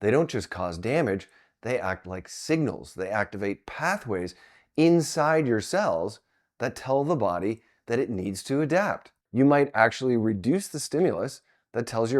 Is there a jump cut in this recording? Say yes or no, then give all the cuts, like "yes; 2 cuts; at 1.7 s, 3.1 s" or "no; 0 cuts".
yes; 1 cut; at 9.2 s